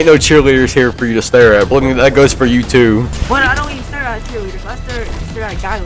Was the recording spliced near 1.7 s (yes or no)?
yes